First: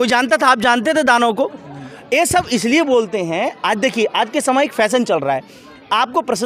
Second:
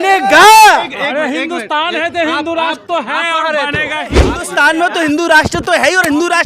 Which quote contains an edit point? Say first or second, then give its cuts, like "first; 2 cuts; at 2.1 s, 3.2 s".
second; 1 cut; at 4.4 s